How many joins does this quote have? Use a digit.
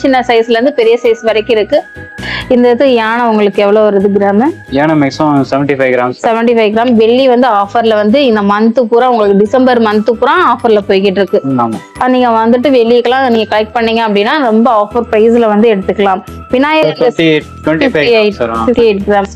2